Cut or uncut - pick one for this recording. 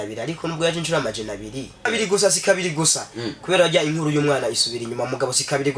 cut